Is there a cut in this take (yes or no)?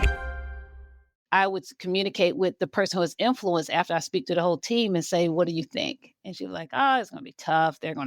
yes